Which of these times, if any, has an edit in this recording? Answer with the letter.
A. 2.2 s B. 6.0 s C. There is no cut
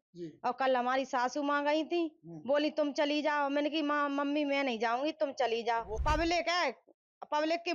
B